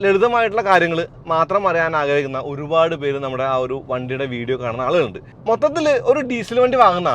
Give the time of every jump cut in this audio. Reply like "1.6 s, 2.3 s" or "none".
5.3 s